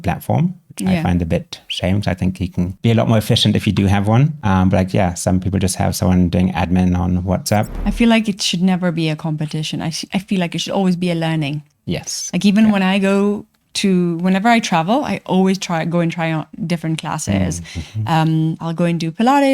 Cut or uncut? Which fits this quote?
cut